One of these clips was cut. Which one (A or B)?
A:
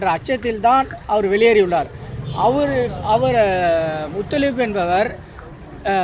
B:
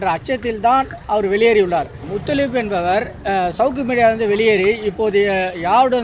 B